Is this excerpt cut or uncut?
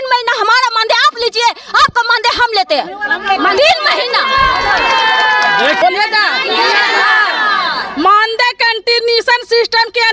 cut